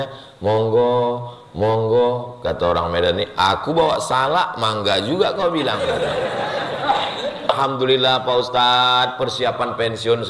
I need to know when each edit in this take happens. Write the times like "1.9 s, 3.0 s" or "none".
7.5 s